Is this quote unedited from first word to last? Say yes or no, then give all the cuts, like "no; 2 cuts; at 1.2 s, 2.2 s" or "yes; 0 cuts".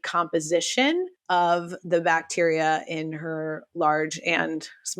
no; 1 cut; at 1.2 s